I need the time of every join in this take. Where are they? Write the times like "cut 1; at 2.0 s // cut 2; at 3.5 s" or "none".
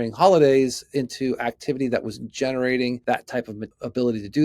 cut 1; at 3.3 s